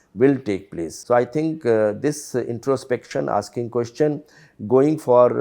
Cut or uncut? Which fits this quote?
cut